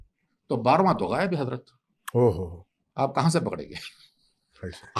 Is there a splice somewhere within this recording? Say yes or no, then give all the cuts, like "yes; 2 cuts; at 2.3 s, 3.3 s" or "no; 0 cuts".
no; 0 cuts